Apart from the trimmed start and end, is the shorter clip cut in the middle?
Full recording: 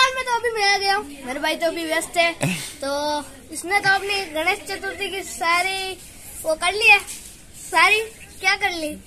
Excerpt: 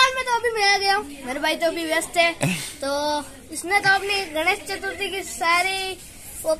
no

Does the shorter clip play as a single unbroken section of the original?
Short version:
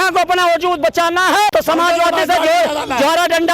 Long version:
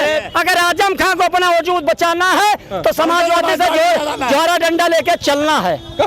no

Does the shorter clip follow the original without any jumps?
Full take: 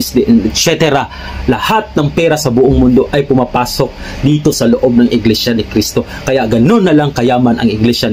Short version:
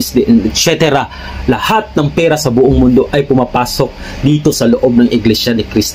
yes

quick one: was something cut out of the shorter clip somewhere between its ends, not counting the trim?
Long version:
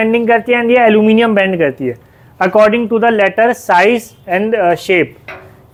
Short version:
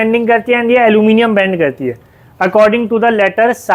no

